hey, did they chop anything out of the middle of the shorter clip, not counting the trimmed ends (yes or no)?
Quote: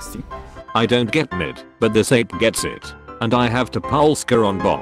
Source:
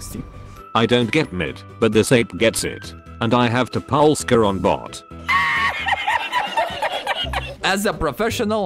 no